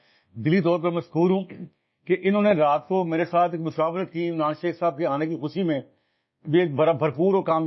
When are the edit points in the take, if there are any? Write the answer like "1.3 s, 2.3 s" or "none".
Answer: none